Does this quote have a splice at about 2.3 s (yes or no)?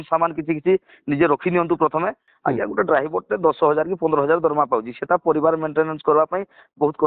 yes